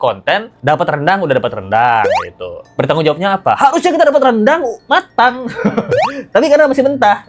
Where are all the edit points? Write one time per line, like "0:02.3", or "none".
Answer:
none

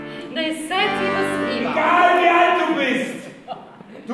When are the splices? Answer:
0:01.7

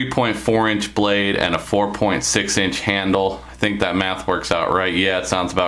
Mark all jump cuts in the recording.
none

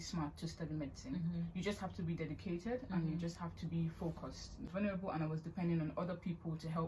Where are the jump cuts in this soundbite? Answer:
0:04.7

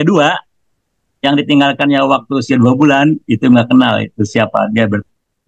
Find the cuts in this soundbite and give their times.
none

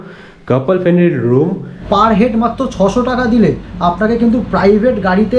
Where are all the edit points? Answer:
0:01.7

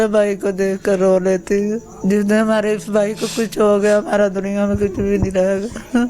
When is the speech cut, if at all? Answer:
0:01.9

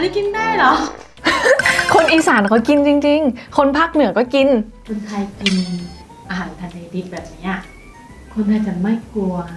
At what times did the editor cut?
0:04.8

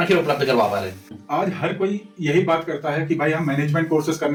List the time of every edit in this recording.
none

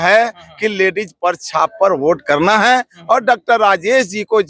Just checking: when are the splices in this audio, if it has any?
none

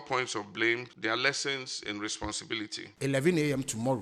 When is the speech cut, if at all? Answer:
0:00.9
0:02.5

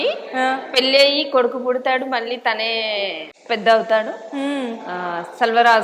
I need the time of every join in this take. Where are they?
0:03.3

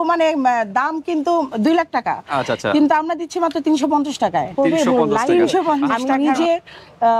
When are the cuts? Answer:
0:05.9

